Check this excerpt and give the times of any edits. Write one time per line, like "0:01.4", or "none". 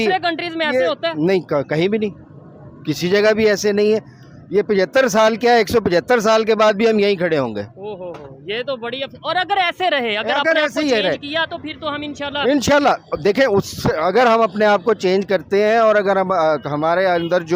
none